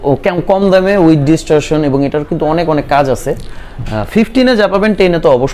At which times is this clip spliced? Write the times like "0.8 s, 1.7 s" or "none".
none